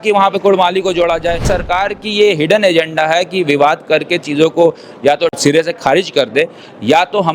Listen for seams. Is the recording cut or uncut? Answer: cut